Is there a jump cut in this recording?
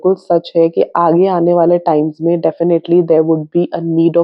no; 0 cuts

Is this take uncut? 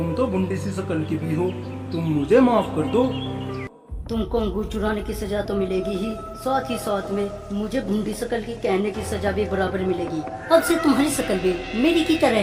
yes; 0 cuts

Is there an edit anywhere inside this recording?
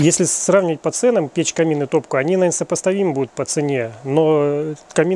no; 0 cuts

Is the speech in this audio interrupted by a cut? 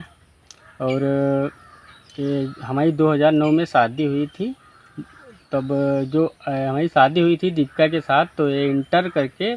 no; 0 cuts

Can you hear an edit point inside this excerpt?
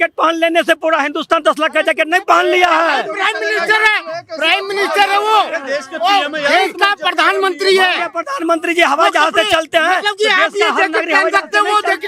no; 0 cuts

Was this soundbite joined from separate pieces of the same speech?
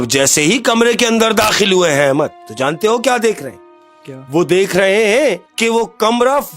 yes; 2 cuts; at 2.4 s, 5.5 s

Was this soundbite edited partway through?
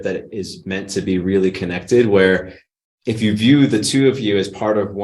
no; 0 cuts

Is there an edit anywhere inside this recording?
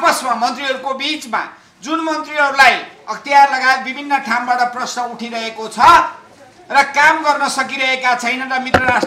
no; 0 cuts

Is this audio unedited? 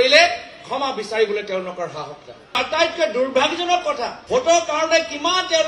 no; 2 cuts; at 2.6 s, 4.2 s

